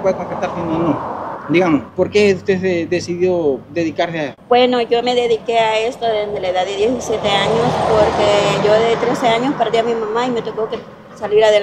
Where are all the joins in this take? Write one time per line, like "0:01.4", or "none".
0:01.3
0:01.9
0:04.4